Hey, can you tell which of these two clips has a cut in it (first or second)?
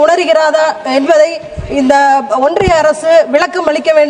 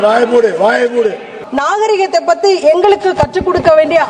second